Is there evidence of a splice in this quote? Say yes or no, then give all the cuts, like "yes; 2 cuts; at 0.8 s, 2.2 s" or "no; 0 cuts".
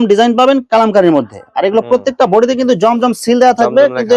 no; 0 cuts